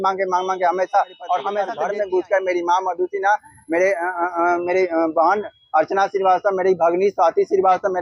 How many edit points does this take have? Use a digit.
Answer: 1